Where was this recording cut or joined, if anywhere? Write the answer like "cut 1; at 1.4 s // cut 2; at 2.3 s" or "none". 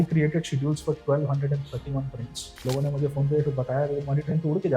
cut 1; at 2.6 s